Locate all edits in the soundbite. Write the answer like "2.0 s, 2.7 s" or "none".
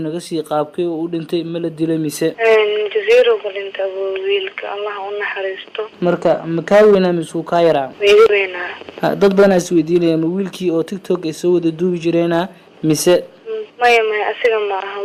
none